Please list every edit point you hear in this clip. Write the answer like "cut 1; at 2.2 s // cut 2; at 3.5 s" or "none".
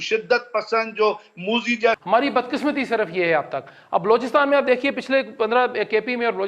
cut 1; at 2.0 s